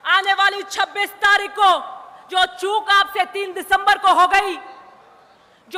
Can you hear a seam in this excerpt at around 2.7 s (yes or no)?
no